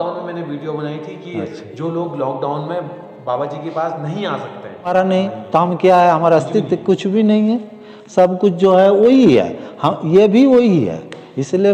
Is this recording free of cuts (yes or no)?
no